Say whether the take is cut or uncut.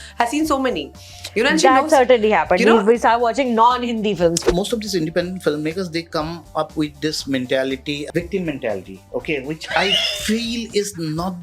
cut